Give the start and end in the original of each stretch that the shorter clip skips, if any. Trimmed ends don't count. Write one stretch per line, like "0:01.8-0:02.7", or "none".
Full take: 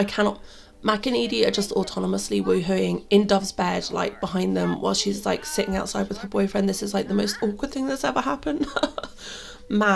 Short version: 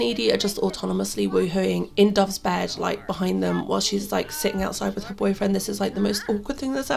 none